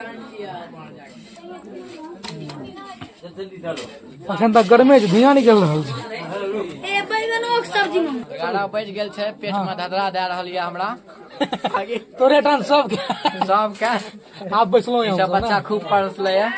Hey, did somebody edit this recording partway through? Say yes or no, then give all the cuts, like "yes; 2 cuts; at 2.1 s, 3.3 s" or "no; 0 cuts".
yes; 1 cut; at 8.3 s